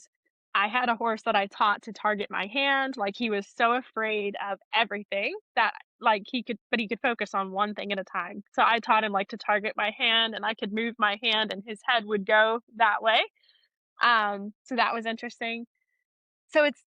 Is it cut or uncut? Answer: uncut